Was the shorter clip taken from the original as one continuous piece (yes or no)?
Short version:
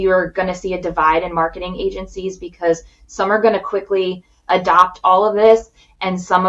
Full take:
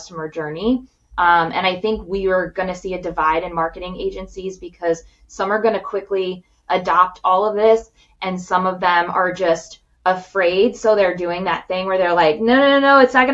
yes